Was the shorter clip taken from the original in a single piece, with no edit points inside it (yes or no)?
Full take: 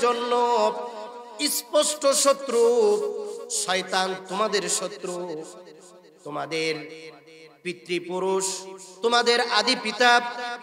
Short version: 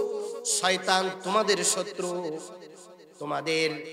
yes